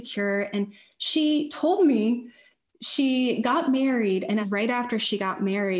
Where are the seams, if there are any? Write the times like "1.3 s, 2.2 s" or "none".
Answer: 4.4 s